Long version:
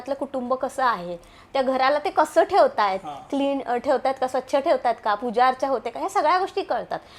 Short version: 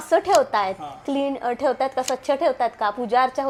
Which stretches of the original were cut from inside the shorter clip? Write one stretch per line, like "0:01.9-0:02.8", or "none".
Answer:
none